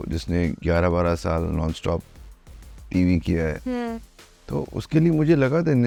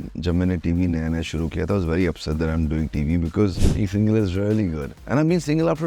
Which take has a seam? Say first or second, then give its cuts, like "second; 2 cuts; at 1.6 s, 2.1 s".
second; 1 cut; at 3.6 s